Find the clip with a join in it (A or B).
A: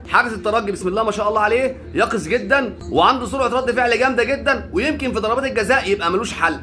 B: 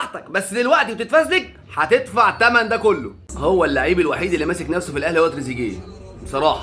B